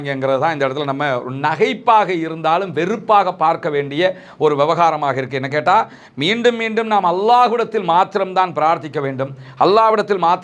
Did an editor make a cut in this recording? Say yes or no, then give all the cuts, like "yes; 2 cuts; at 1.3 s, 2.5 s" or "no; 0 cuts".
no; 0 cuts